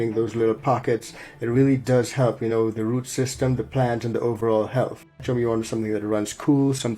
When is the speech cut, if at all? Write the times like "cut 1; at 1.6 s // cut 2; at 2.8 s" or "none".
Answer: cut 1; at 5.2 s